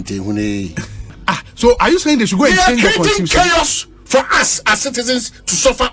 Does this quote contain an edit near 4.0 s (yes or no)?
no